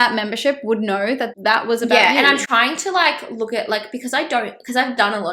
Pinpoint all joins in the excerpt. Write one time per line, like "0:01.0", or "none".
0:01.3